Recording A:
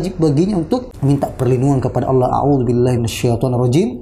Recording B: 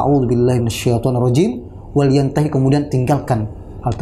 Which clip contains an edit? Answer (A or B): A